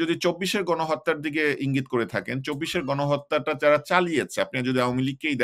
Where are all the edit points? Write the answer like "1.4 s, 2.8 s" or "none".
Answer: none